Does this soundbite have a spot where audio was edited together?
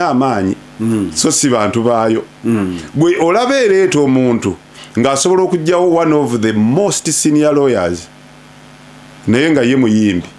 no; 0 cuts

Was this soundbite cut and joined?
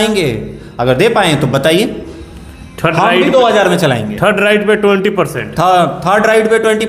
no; 0 cuts

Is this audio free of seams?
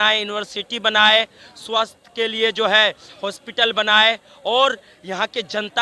yes; 0 cuts

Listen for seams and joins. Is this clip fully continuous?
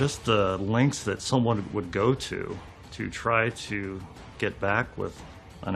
yes; 0 cuts

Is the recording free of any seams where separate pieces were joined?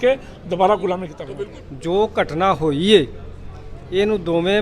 no; 1 cut; at 1.2 s

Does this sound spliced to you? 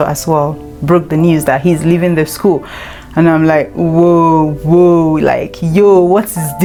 no; 0 cuts

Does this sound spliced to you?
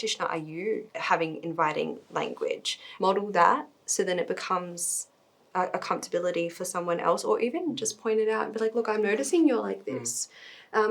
yes; 2 cuts; at 0.9 s, 2.8 s

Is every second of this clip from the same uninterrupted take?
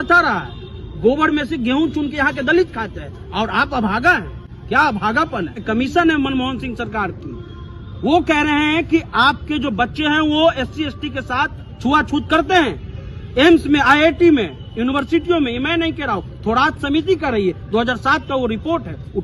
no; 1 cut; at 5.6 s

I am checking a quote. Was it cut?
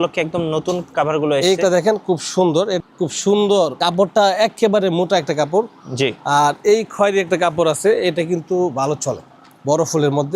yes; 1 cut; at 2.8 s

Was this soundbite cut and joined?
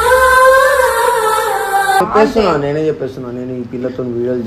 yes; 1 cut; at 2.1 s

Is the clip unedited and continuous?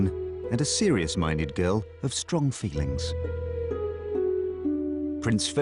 yes; 0 cuts

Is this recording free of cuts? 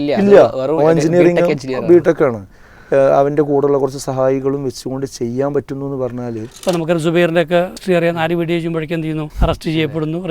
no; 3 cuts; at 6.4 s, 7.8 s, 9.3 s

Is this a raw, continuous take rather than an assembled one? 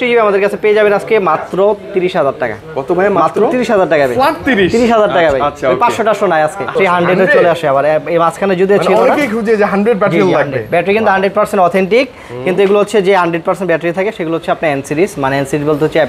no; 1 cut; at 6.8 s

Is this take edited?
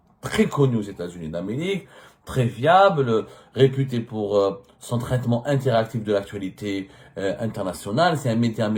no; 0 cuts

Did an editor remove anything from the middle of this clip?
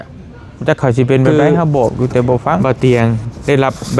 yes; 1 cut; at 2.6 s

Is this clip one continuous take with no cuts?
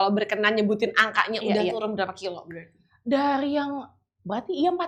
yes; 0 cuts

